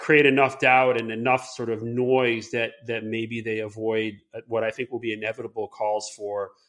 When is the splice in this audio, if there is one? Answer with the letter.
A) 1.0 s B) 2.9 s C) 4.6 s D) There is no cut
D